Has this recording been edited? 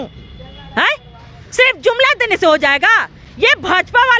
no; 0 cuts

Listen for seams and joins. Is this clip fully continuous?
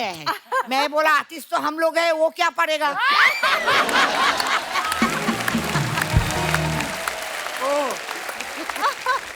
yes; 0 cuts

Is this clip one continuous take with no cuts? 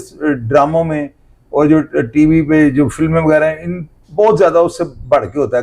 yes; 0 cuts

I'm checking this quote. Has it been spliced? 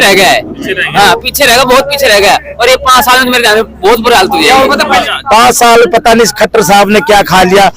yes; 1 cut; at 5.1 s

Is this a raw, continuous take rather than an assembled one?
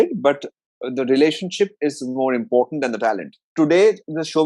no; 1 cut; at 3.4 s

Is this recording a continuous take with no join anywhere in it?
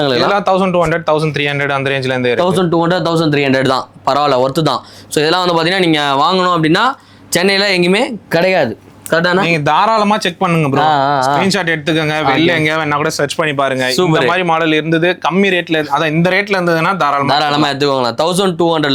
yes; 0 cuts

